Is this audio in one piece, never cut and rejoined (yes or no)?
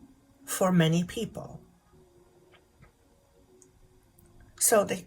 no